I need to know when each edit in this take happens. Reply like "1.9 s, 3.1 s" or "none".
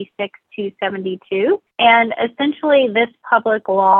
1.7 s